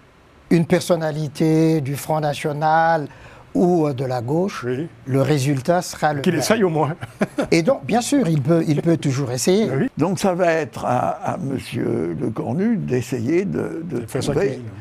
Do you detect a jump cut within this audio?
yes; 1 cut; at 9.9 s

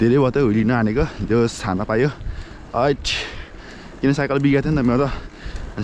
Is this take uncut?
yes; 0 cuts

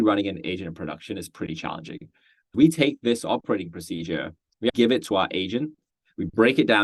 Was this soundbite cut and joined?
yes; 2 cuts; at 2.5 s, 4.7 s

